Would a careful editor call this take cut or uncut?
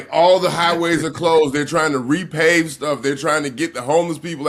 uncut